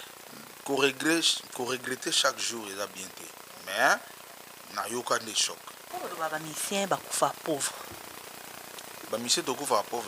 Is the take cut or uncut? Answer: cut